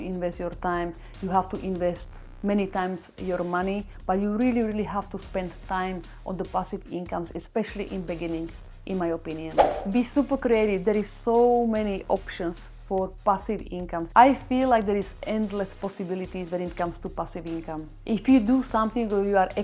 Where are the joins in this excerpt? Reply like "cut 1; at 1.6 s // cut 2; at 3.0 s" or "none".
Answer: none